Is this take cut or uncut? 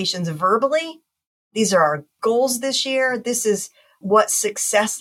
cut